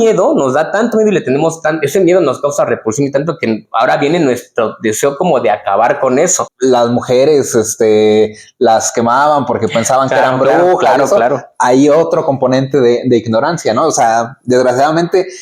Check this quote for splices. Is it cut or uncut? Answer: cut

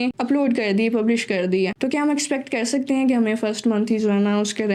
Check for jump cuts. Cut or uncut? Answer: uncut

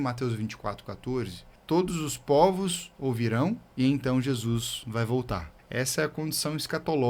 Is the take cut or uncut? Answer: cut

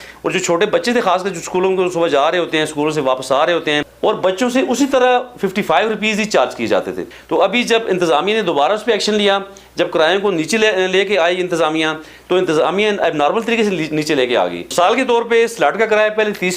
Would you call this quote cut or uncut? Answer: cut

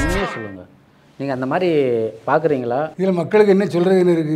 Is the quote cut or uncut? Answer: cut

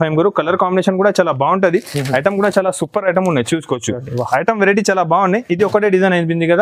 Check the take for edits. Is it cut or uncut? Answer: uncut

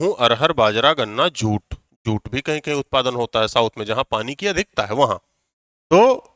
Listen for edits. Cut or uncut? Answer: uncut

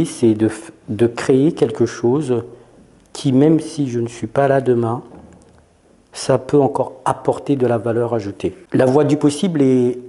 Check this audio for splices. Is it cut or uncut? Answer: cut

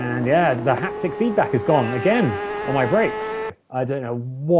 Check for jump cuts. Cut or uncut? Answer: cut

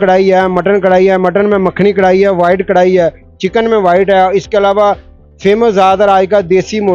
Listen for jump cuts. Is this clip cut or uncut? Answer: uncut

